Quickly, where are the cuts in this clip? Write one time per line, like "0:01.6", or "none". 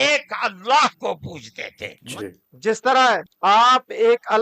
0:02.0

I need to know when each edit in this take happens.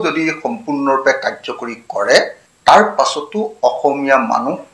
0:02.4

